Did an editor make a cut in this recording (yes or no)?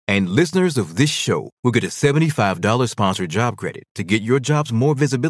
no